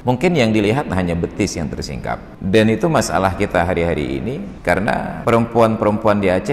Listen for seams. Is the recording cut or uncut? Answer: cut